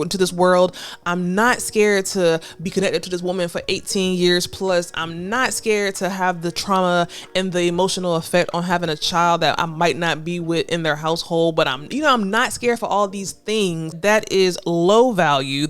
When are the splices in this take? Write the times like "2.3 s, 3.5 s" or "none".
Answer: 13.9 s